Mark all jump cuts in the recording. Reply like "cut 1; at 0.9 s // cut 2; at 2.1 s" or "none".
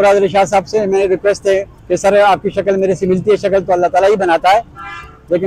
cut 1; at 1.7 s